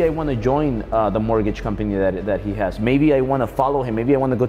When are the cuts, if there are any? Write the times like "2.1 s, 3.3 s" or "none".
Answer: none